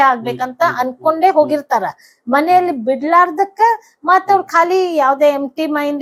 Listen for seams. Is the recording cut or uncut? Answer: uncut